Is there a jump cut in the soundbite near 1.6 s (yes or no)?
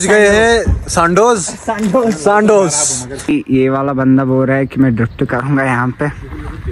no